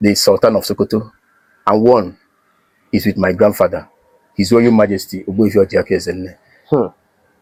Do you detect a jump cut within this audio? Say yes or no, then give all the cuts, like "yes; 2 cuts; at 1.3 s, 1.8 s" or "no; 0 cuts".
no; 0 cuts